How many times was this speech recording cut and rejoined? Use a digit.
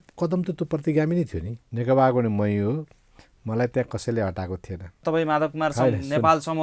2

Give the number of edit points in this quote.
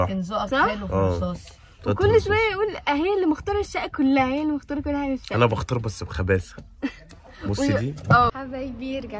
1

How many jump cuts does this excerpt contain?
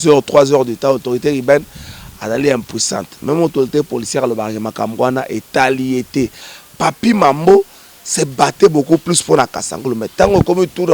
1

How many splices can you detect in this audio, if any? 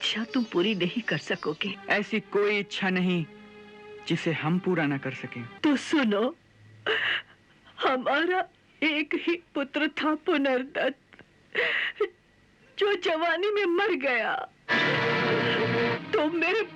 3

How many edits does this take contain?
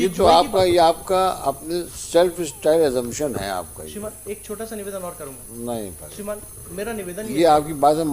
0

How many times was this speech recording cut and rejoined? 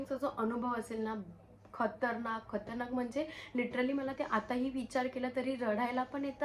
0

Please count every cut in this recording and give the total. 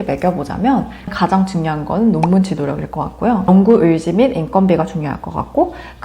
2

